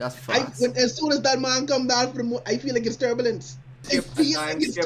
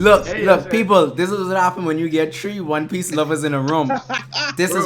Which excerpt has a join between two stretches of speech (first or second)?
first